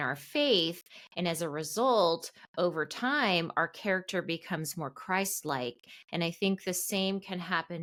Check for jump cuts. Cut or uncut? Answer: uncut